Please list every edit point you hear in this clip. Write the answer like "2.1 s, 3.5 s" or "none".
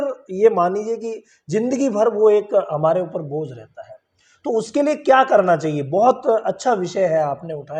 none